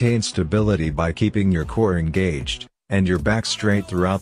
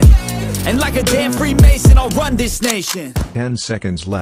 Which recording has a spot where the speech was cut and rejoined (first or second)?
second